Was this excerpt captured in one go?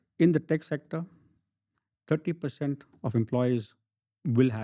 yes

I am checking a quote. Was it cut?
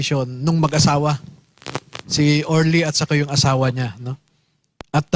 no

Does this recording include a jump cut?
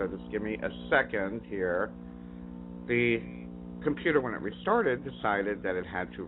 no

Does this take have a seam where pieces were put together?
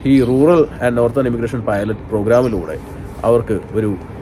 no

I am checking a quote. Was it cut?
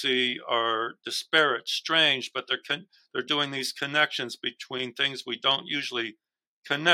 no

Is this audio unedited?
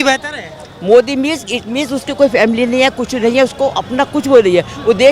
yes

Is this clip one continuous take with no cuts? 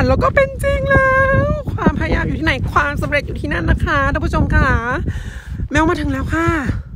yes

